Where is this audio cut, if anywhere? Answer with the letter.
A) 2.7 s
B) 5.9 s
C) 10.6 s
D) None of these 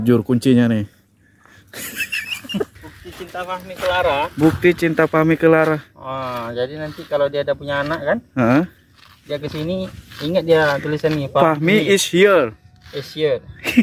A